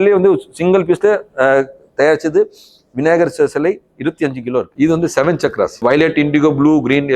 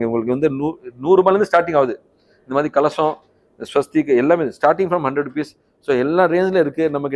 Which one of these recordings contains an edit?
first; 2 cuts; at 4.7 s, 5.8 s

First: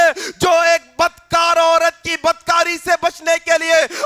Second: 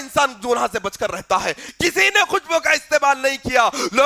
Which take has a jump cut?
second; 1 cut; at 1.7 s

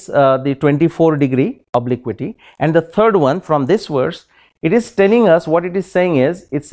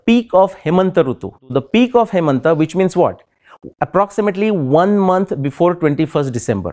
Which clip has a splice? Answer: second; 1 cut; at 1.4 s

